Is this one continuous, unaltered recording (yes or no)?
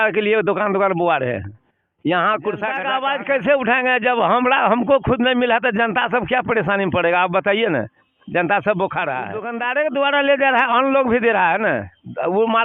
no